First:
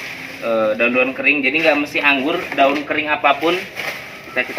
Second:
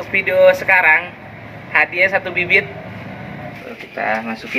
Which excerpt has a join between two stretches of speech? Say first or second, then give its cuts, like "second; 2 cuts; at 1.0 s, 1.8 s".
second; 1 cut; at 3.6 s